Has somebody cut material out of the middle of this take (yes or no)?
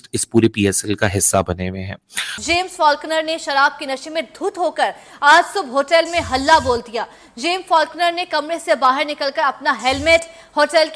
yes